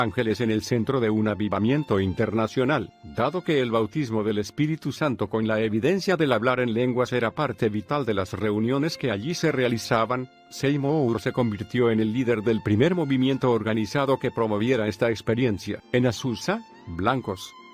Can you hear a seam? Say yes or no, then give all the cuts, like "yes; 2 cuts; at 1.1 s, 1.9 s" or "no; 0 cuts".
yes; 1 cut; at 6.9 s